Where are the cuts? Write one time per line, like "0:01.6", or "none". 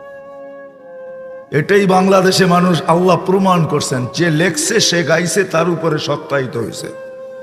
none